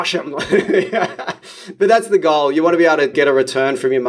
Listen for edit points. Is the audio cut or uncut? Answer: cut